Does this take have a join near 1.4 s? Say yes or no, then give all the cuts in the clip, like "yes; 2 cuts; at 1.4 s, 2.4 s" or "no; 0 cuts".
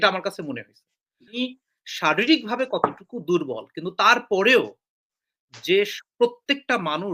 yes; 1 cut; at 1.4 s